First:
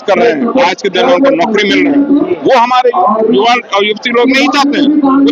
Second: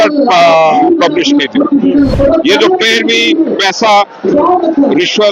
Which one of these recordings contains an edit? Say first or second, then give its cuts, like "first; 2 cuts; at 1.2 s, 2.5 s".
second; 1 cut; at 2.1 s